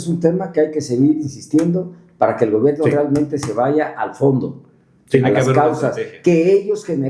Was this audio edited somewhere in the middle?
no; 0 cuts

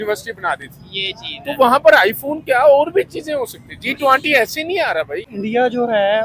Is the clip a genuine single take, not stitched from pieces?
no; 1 cut; at 5.3 s

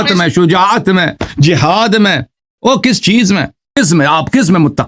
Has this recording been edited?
yes; 1 cut; at 3.8 s

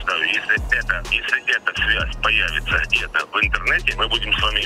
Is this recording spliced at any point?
yes; 2 cuts; at 1.1 s, 3.9 s

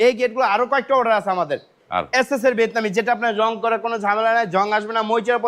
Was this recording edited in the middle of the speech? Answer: no; 0 cuts

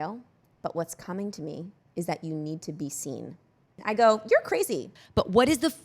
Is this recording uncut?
no; 2 cuts; at 3.8 s, 4.9 s

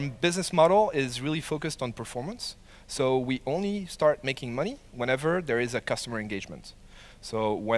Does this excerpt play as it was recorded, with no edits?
no; 1 cut; at 4.1 s

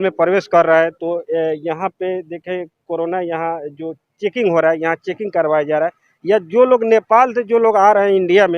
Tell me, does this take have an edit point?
no; 0 cuts

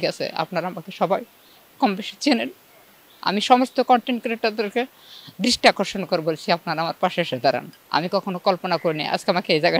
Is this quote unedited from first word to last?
no; 1 cut; at 7.8 s

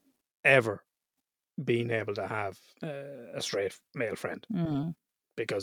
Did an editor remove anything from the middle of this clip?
yes; 1 cut; at 2.7 s

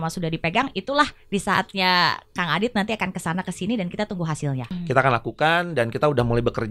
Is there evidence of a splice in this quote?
yes; 1 cut; at 4.7 s

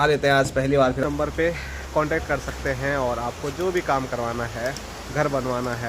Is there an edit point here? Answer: yes; 1 cut; at 1.0 s

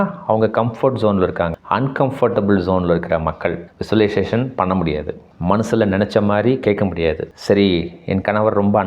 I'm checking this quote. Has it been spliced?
yes; 1 cut; at 1.5 s

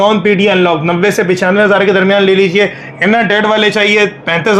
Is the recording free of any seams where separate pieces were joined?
yes; 0 cuts

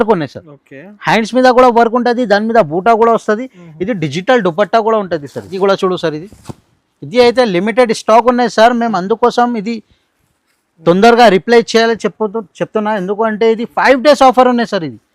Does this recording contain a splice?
yes; 1 cut; at 5.5 s

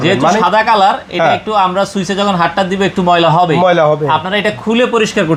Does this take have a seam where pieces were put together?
no; 0 cuts

